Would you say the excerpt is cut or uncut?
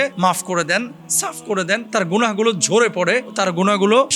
uncut